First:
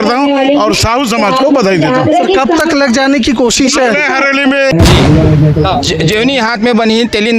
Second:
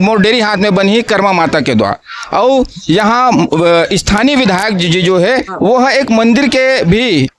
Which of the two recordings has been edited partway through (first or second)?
first